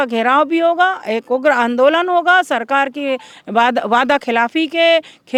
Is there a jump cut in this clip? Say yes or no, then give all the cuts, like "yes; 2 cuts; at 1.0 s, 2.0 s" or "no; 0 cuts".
no; 0 cuts